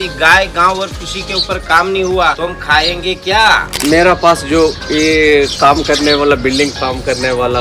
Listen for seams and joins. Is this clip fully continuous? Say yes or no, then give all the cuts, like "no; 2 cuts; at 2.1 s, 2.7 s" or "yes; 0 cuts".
no; 2 cuts; at 2.4 s, 3.7 s